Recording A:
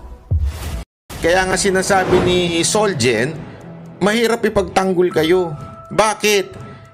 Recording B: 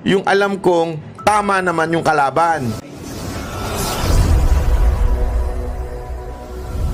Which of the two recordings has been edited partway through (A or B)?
A